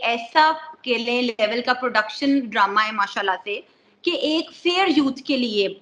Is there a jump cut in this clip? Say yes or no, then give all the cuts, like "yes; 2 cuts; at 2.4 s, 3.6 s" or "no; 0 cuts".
no; 0 cuts